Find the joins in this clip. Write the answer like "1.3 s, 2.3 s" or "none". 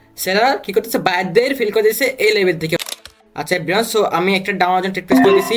2.8 s